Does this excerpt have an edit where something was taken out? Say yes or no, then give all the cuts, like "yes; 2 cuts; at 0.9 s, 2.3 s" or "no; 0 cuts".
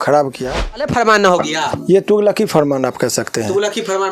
yes; 1 cut; at 0.9 s